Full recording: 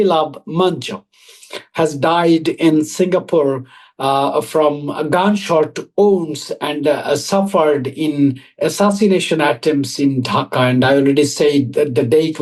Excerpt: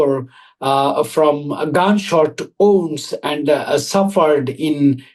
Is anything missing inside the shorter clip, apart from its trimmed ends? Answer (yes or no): no